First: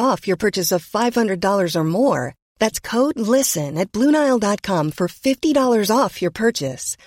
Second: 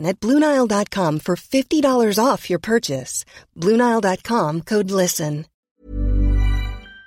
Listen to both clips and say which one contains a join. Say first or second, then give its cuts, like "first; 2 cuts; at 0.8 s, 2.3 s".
second; 1 cut; at 5.5 s